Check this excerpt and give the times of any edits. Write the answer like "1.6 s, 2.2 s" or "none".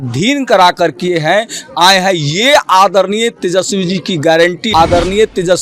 4.6 s